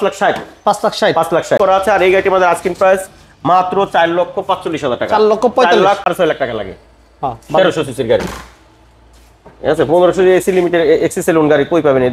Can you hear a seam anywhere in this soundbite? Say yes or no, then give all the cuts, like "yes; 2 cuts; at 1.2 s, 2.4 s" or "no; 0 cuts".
yes; 2 cuts; at 1.6 s, 6.0 s